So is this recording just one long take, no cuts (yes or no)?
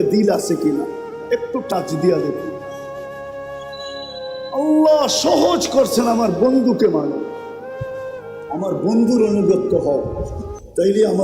no